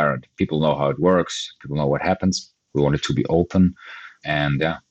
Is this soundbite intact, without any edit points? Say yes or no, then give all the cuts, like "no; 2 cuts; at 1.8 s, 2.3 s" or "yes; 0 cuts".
no; 1 cut; at 2.5 s